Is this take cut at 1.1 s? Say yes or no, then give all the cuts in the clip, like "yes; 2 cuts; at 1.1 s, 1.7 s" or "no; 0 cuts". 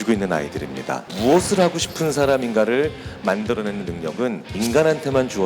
yes; 2 cuts; at 1.1 s, 4.5 s